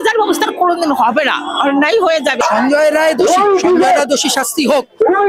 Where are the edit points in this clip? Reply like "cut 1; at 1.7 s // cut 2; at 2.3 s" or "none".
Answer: cut 1; at 2.4 s